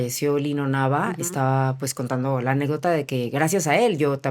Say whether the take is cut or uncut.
uncut